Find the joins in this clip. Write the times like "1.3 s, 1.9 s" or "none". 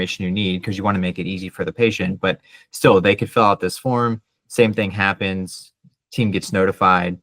none

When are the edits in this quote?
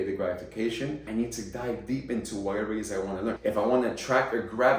1.0 s, 3.4 s

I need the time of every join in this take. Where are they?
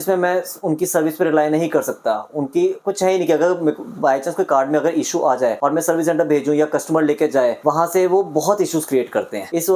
none

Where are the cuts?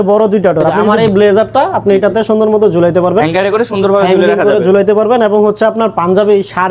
0.9 s

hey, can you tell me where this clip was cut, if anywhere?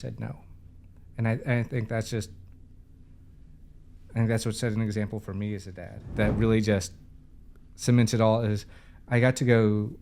6.1 s

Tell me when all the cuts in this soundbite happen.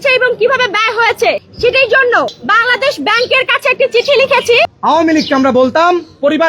2.4 s, 4.7 s

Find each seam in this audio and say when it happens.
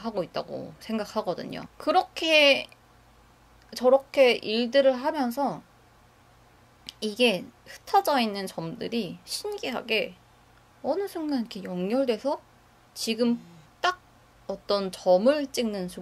1.7 s

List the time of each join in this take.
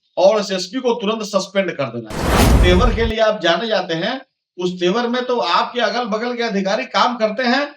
2.5 s

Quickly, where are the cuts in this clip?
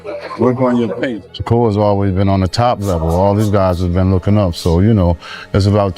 1.2 s

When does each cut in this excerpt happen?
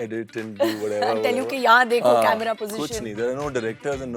none

